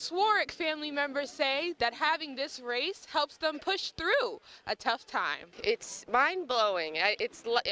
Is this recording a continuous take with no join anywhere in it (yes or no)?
yes